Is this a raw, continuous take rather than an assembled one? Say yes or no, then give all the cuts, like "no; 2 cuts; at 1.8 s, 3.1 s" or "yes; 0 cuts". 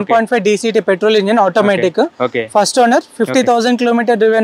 yes; 0 cuts